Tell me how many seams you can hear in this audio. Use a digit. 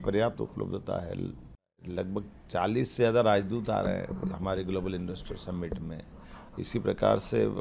1